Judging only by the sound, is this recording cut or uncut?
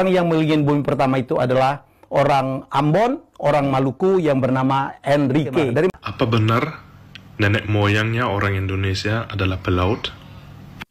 cut